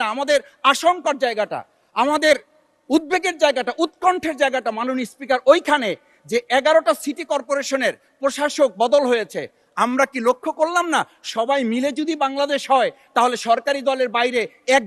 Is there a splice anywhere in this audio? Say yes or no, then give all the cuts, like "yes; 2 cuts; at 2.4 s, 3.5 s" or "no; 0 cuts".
no; 0 cuts